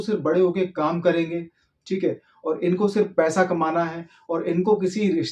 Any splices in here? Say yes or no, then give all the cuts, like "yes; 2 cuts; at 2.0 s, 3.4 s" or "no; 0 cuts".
no; 0 cuts